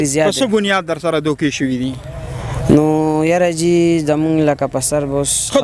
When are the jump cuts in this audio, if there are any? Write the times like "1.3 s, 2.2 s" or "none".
none

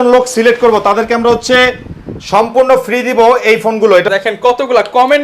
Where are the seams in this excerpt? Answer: 4.1 s

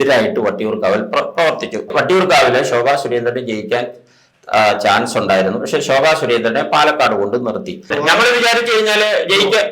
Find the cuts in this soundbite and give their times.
1.9 s, 7.9 s

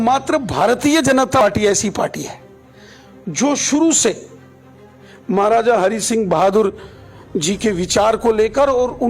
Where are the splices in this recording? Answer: 1.4 s

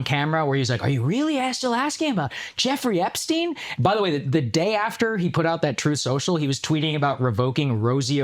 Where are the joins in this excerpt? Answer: none

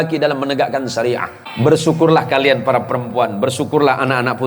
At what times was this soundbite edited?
1.4 s

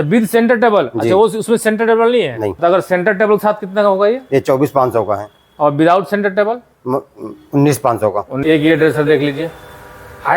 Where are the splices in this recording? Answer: 2.6 s, 8.3 s

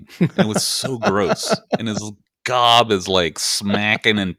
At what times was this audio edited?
none

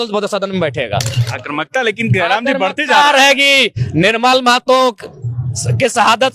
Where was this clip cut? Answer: 1.2 s

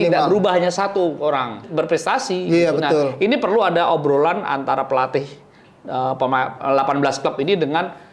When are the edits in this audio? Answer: 1.7 s

